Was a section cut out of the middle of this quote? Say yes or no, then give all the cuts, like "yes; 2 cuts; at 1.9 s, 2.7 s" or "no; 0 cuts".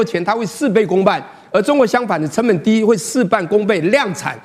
no; 0 cuts